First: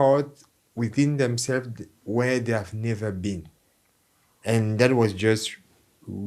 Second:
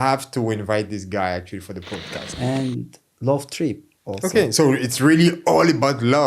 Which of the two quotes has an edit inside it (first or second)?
second